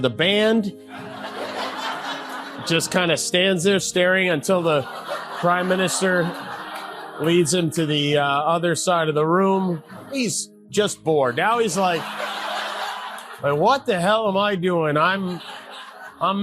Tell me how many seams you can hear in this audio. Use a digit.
1